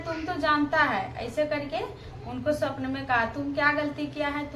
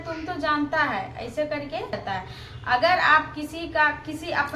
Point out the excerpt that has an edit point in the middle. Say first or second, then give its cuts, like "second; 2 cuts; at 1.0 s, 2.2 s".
second; 1 cut; at 2.0 s